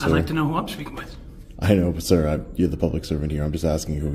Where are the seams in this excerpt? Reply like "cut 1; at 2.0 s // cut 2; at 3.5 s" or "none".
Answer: none

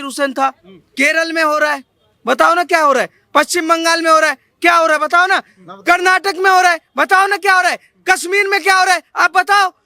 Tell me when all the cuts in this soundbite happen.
cut 1; at 0.9 s

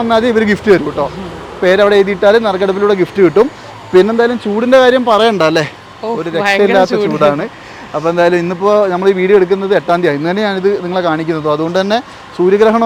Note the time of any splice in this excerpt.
none

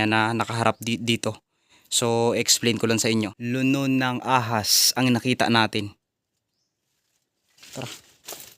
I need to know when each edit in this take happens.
cut 1; at 3.4 s

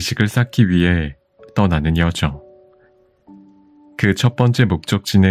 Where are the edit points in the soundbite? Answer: cut 1; at 2.4 s // cut 2; at 3.9 s

